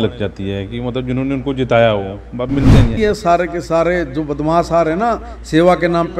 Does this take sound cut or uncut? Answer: cut